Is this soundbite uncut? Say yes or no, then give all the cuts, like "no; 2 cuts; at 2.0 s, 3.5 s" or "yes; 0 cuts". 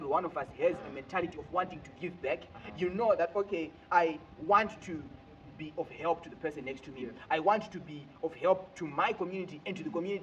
yes; 0 cuts